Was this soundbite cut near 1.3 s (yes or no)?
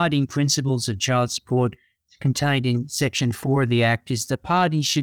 no